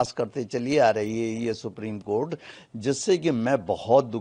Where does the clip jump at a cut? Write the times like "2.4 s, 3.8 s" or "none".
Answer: none